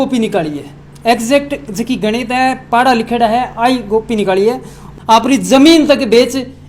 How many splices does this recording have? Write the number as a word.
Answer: one